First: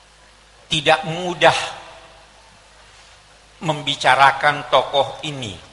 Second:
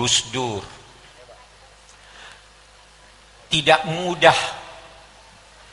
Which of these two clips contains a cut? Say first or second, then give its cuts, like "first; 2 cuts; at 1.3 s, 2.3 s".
second; 1 cut; at 1.1 s